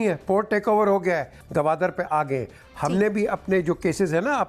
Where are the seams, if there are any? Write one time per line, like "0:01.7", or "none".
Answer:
0:01.4